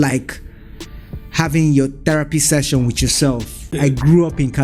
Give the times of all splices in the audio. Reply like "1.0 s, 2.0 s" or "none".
3.7 s